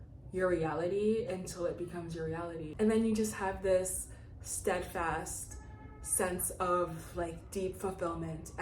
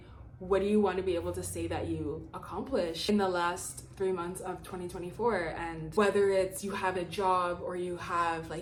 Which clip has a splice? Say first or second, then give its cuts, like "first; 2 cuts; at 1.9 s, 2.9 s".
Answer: first; 1 cut; at 2.7 s